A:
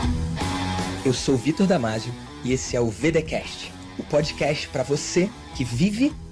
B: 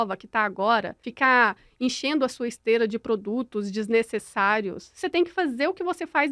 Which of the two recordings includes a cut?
B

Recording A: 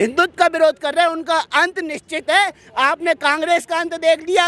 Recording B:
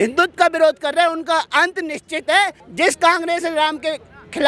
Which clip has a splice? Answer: B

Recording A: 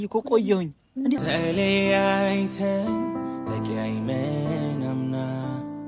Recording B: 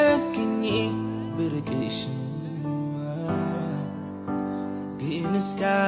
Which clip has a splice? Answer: A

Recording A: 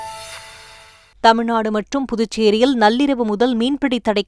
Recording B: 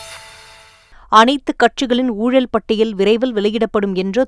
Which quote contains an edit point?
A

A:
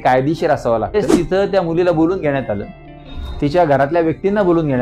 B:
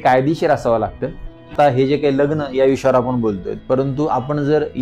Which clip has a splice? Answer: A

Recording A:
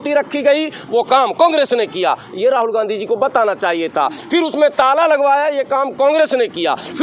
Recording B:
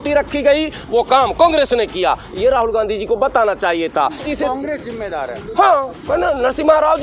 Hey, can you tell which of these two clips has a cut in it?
B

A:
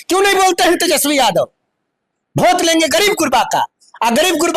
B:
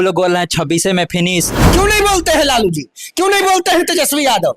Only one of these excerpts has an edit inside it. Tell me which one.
B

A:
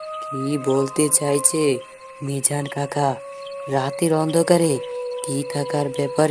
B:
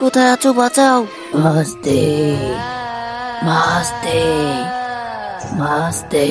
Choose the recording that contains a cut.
B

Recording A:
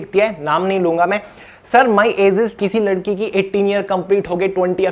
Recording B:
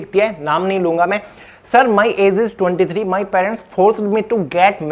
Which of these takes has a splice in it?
A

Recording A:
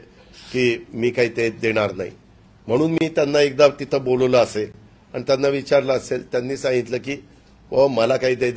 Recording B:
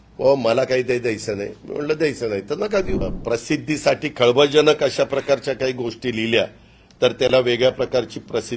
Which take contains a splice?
B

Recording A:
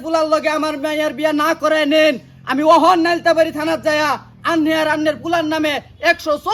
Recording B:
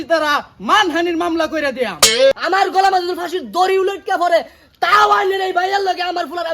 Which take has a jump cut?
B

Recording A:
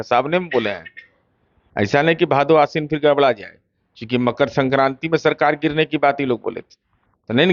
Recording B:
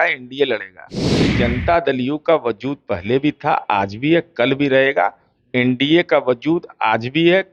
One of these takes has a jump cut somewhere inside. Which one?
B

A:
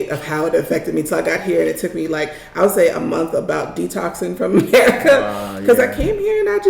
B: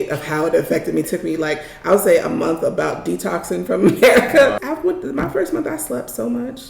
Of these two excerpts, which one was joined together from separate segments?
B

